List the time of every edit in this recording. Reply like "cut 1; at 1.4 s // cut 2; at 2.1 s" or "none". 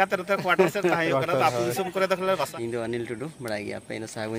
cut 1; at 2.5 s

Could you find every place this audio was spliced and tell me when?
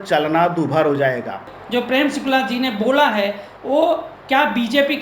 cut 1; at 1.5 s

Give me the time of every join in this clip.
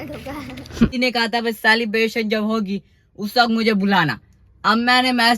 cut 1; at 0.9 s

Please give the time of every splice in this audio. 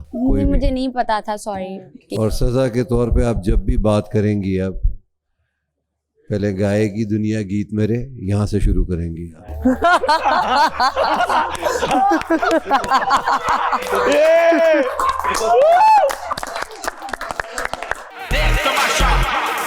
cut 1; at 18.1 s

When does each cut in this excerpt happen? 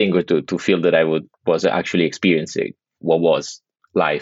cut 1; at 2.9 s

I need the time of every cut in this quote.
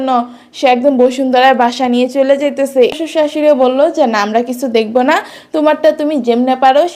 cut 1; at 2.9 s

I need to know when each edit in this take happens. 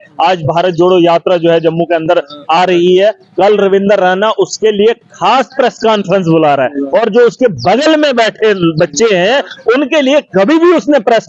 none

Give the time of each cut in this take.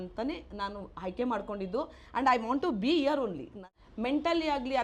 cut 1; at 3.8 s

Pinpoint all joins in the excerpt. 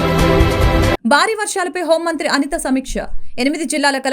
cut 1; at 0.9 s

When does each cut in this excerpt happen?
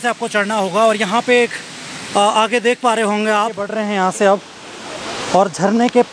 cut 1; at 3.6 s

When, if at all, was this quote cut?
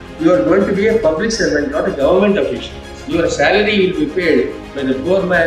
cut 1; at 2.9 s

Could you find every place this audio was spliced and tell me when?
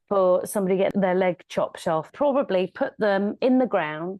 cut 1; at 0.9 s // cut 2; at 2.1 s

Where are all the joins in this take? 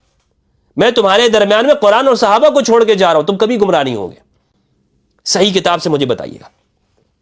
none

